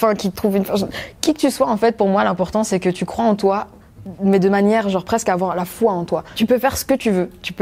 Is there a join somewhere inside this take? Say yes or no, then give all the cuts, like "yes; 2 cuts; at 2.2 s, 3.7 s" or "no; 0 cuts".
yes; 1 cut; at 6.3 s